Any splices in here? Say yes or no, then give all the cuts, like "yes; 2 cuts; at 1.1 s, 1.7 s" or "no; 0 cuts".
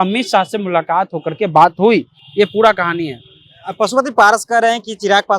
no; 0 cuts